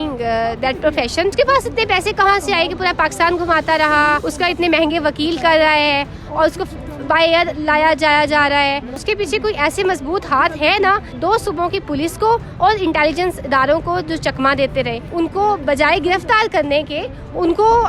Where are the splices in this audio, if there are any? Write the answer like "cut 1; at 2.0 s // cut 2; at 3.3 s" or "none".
cut 1; at 1.3 s // cut 2; at 4.3 s // cut 3; at 8.9 s // cut 4; at 11.1 s // cut 5; at 15.0 s